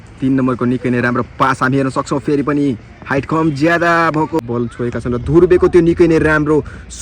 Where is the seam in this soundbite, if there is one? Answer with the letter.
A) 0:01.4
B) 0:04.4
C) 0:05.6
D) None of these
B